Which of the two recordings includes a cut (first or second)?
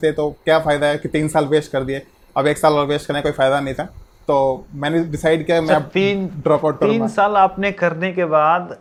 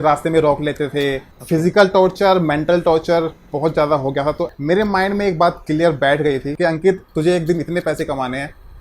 second